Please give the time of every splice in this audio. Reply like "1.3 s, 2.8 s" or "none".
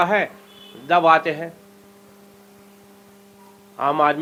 none